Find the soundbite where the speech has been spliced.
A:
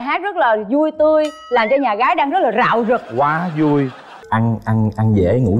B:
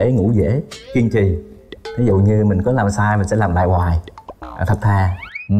A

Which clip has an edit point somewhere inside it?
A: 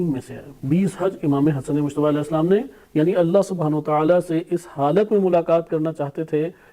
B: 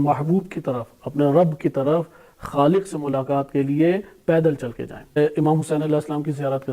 B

